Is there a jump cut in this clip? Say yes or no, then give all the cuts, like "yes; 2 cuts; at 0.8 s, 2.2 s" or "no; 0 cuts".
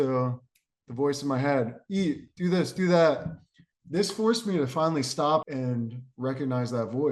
yes; 1 cut; at 5.4 s